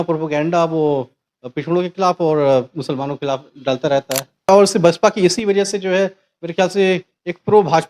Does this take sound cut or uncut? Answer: cut